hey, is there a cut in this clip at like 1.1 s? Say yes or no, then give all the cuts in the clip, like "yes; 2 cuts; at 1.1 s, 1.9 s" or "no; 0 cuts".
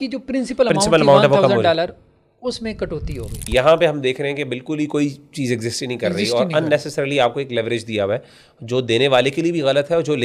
no; 1 cut; at 3.4 s